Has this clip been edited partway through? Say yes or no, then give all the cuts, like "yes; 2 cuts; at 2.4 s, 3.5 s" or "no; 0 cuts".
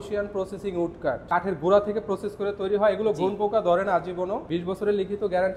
yes; 2 cuts; at 1.2 s, 4.4 s